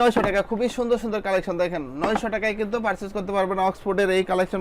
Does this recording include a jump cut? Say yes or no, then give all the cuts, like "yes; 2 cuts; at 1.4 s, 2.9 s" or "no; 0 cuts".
no; 0 cuts